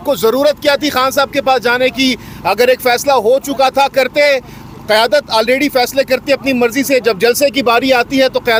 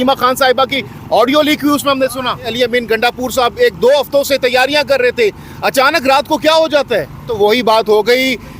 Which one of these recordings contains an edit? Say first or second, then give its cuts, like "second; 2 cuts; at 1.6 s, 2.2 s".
second; 2 cuts; at 2.5 s, 7.3 s